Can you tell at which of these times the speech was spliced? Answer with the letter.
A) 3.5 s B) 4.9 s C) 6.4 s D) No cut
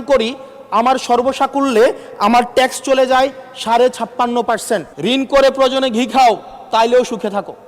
B